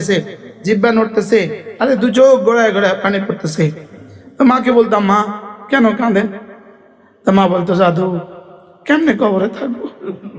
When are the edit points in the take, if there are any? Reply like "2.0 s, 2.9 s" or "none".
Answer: none